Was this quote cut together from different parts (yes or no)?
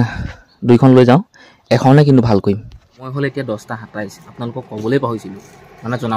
yes